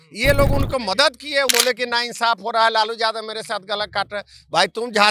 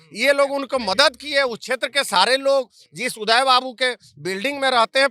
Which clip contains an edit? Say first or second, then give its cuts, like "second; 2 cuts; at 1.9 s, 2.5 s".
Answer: first; 1 cut; at 1.5 s